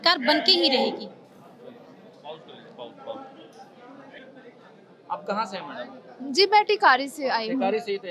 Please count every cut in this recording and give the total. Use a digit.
0